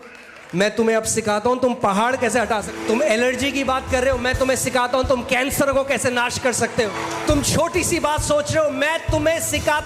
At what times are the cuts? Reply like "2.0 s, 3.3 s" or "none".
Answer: 2.7 s, 6.9 s

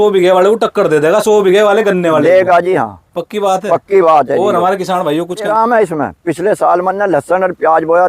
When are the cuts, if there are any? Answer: 5.5 s

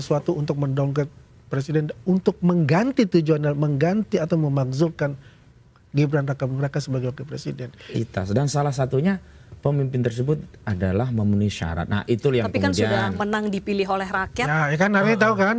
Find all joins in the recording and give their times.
7.9 s

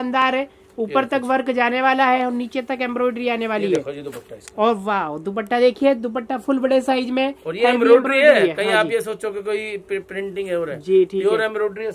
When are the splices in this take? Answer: none

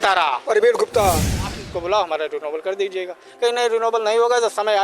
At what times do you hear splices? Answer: 1.6 s

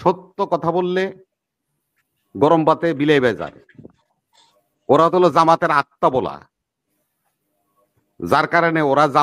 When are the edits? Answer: none

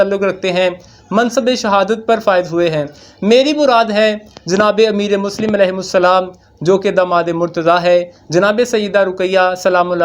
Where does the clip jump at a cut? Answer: none

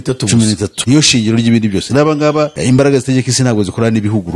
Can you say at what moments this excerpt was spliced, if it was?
2.6 s

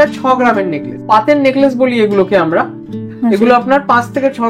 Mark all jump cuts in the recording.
1.1 s, 2.8 s

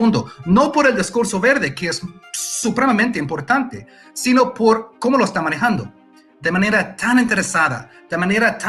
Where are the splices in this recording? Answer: none

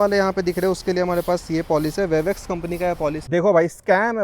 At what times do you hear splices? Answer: 3.2 s

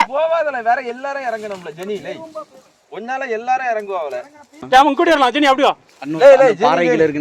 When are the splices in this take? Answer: none

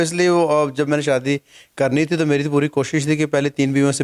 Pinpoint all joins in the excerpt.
none

